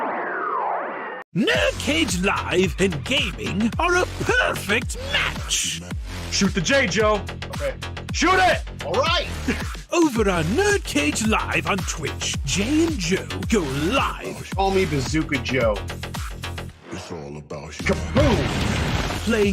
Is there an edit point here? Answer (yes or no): yes